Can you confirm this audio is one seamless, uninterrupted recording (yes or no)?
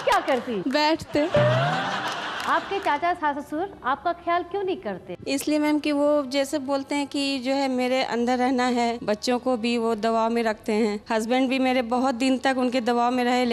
no